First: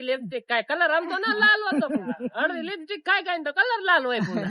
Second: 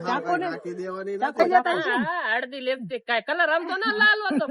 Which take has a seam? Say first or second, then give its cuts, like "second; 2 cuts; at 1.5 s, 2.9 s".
second; 1 cut; at 1.4 s